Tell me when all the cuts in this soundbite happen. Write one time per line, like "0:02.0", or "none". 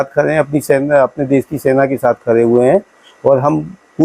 none

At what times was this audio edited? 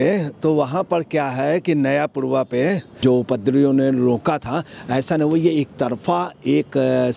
0:02.9

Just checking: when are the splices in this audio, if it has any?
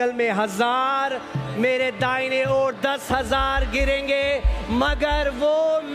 none

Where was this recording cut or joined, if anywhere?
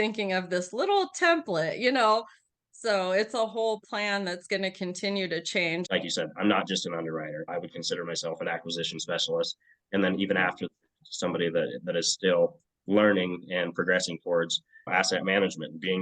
0:05.8

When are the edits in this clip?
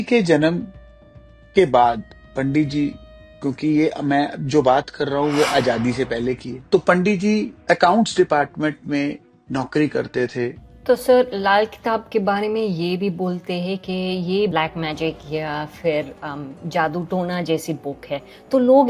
0:06.5
0:07.5
0:10.7
0:14.5

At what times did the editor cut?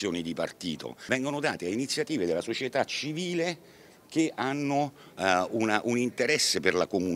0:00.9

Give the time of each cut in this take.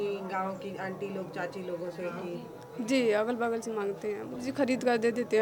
0:04.4

